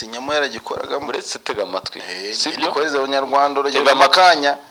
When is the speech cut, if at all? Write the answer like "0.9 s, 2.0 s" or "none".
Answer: none